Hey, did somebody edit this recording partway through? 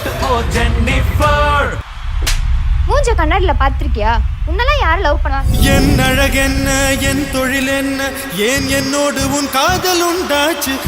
yes; 1 cut; at 1.8 s

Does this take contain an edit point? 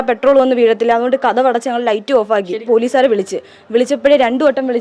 yes; 1 cut; at 2.6 s

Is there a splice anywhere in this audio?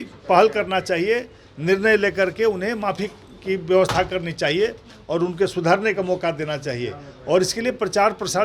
no; 0 cuts

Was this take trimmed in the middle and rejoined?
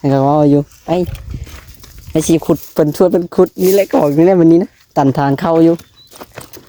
no; 0 cuts

